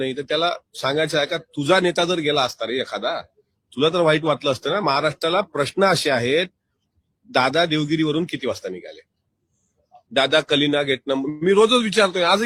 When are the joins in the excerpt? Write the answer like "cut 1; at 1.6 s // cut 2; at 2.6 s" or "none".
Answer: none